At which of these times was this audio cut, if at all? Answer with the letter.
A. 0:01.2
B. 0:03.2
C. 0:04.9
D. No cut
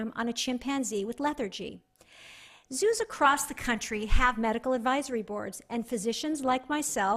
D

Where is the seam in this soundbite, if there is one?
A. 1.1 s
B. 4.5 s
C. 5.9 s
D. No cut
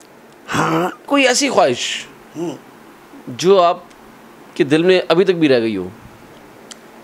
A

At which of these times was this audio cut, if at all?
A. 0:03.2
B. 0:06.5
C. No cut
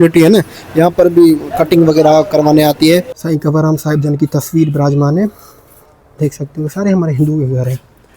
A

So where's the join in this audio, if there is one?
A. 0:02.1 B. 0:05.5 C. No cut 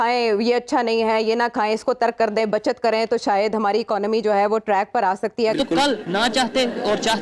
B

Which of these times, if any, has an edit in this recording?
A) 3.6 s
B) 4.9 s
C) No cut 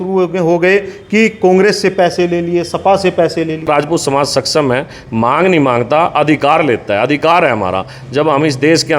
A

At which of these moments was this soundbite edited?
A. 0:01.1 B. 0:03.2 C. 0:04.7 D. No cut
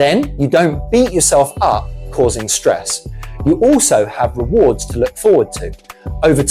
D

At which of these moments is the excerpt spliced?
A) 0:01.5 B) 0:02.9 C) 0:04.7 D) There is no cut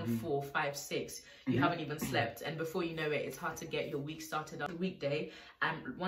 C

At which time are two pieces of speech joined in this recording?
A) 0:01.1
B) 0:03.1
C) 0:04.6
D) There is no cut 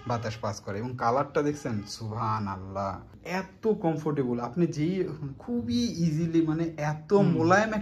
B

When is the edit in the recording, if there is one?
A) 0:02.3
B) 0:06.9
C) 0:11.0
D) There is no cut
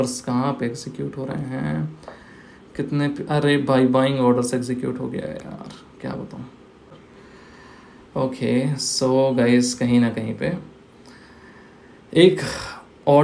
B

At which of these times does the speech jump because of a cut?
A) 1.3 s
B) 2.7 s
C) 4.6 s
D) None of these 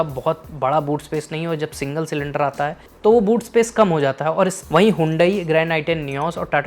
C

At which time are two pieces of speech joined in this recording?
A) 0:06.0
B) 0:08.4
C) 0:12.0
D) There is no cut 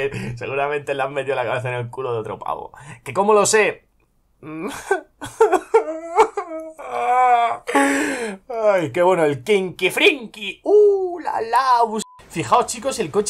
C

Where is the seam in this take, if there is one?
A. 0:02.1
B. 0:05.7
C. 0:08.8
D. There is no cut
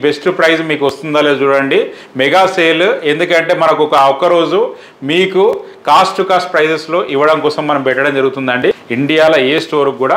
C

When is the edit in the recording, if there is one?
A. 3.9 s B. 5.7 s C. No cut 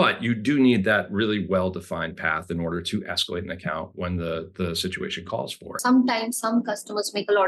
B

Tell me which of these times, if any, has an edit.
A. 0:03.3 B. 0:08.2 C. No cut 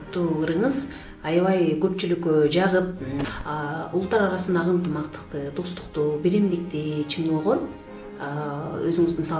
A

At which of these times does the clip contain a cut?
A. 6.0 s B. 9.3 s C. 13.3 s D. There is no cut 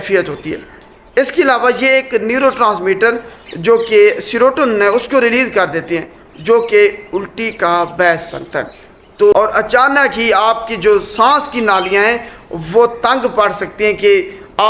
B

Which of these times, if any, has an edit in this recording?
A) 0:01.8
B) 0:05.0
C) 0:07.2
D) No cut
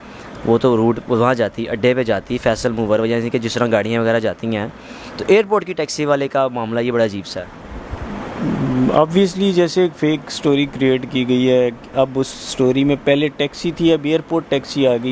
D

